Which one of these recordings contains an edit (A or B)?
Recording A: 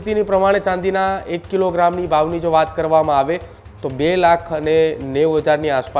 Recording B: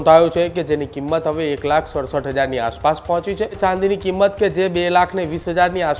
B